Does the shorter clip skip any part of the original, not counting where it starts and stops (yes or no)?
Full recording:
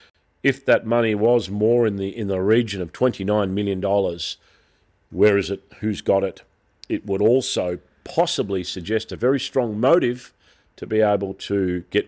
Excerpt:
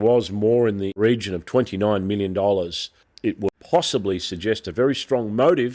yes